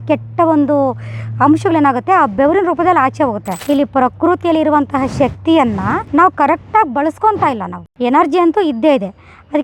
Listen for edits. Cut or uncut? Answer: cut